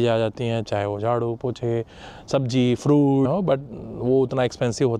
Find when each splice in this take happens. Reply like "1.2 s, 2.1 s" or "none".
3.3 s